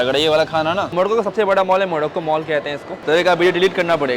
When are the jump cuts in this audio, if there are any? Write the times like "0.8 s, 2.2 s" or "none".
0.9 s, 2.9 s

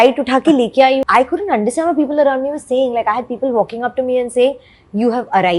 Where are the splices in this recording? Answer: 1.0 s

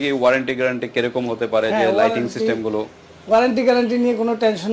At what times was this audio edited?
none

